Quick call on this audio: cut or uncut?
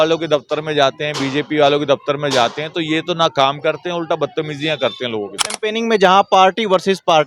cut